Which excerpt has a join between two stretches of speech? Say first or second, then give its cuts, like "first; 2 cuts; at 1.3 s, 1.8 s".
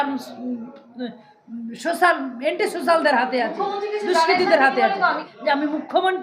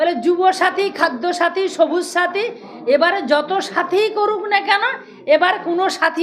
first; 1 cut; at 5.3 s